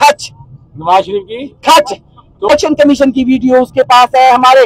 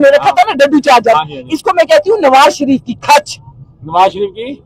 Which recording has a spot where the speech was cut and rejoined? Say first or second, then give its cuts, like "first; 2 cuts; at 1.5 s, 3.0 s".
first; 1 cut; at 2.5 s